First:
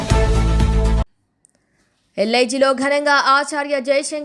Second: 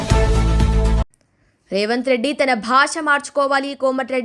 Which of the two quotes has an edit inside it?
first; 1 cut; at 0.9 s

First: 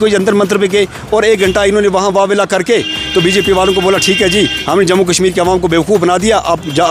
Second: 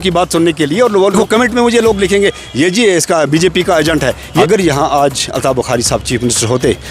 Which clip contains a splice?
second; 2 cuts; at 1.2 s, 4.3 s

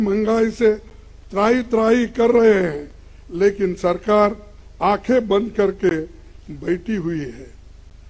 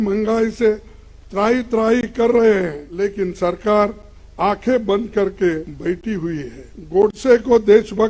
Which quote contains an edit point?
second; 2 cuts; at 2.8 s, 6.3 s

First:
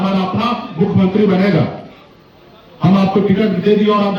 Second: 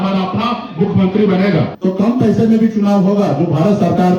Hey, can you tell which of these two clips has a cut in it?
second; 1 cut; at 1.7 s

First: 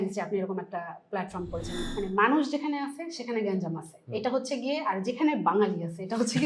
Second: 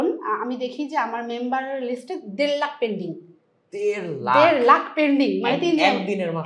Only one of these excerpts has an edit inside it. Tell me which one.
first; 1 cut; at 1.8 s

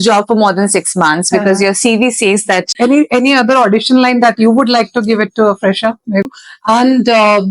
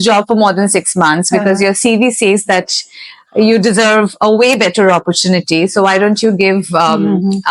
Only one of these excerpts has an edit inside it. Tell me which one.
first; 2 cuts; at 2.7 s, 6.2 s

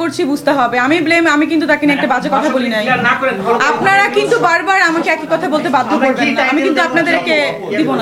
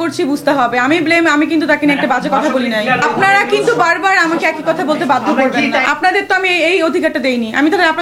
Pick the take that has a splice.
second; 2 cuts; at 3.0 s, 5.8 s

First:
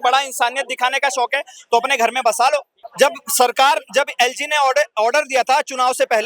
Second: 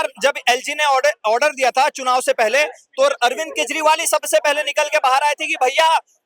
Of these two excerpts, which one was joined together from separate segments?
first; 1 cut; at 2.8 s

